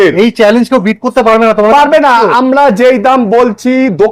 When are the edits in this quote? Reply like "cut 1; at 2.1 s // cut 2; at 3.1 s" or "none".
none

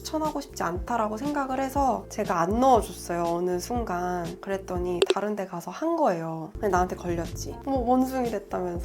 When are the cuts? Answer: cut 1; at 2.0 s // cut 2; at 7.4 s

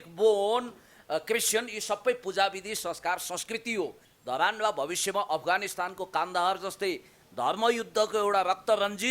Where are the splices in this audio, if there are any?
cut 1; at 4.1 s

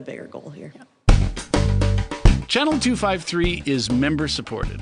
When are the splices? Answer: cut 1; at 1.0 s

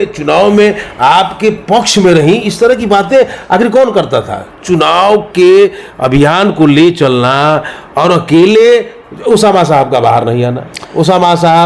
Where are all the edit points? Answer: cut 1; at 4.6 s

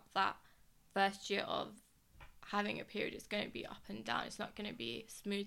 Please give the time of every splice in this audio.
none

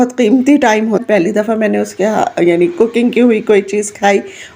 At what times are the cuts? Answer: cut 1; at 1.0 s

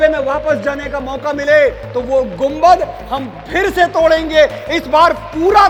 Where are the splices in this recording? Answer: none

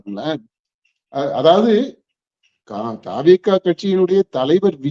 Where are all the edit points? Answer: none

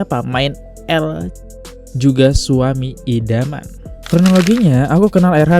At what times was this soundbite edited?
cut 1; at 3.9 s

